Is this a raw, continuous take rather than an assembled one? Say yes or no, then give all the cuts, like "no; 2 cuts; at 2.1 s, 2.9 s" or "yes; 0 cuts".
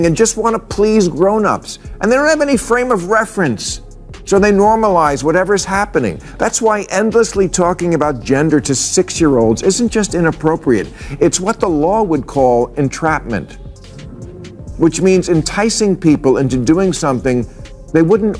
yes; 0 cuts